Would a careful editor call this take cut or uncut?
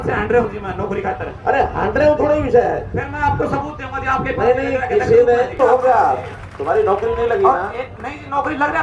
cut